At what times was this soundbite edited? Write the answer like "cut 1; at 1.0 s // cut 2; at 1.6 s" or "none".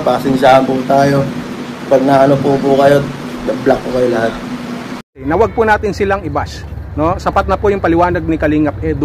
cut 1; at 5.2 s